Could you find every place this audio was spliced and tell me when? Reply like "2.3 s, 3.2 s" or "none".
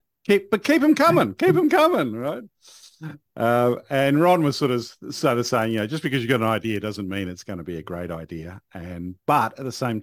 none